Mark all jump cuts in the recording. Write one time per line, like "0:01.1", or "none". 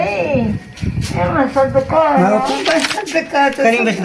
0:02.5